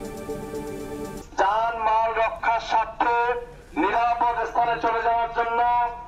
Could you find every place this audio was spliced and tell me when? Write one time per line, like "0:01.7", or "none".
none